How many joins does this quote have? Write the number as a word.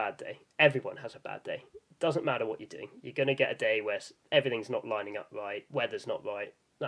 one